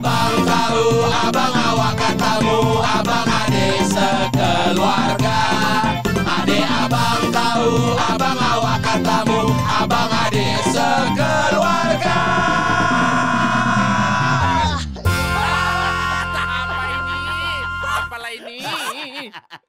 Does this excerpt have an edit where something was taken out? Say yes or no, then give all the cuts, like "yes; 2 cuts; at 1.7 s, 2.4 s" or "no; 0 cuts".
no; 0 cuts